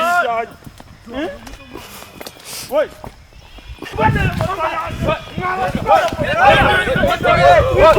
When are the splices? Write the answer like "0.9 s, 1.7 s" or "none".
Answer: 3.9 s